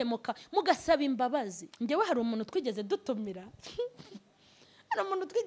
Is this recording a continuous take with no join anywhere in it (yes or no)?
no